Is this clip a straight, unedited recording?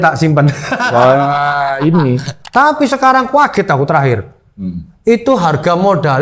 no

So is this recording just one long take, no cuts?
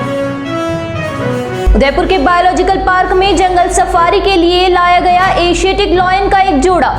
yes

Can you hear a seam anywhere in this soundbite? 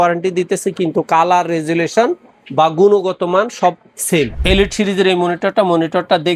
yes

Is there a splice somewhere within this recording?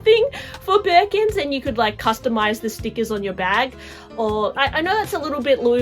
yes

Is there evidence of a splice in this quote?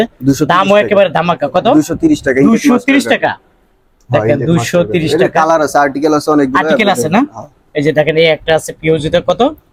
no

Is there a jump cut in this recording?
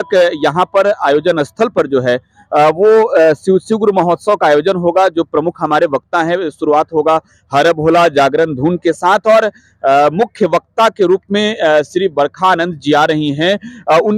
no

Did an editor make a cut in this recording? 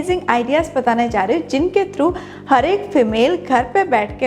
no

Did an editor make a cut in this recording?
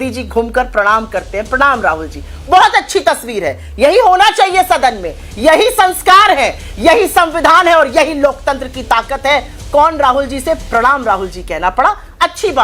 no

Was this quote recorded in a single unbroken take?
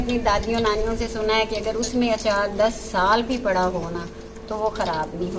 yes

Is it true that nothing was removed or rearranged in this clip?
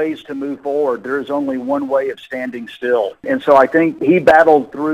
no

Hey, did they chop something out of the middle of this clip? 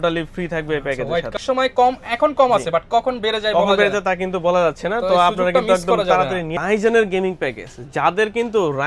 yes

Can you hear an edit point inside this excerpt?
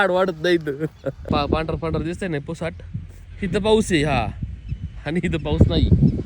yes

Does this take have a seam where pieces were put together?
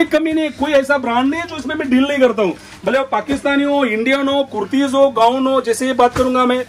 no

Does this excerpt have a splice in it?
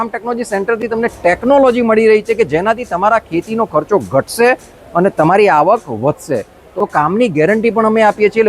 yes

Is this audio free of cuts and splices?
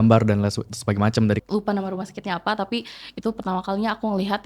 no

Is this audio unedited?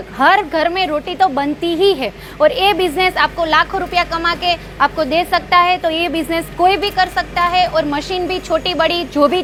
yes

